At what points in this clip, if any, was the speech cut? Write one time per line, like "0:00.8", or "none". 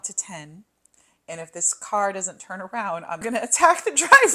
0:03.2